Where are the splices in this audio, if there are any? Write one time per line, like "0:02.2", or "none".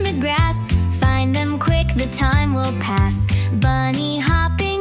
none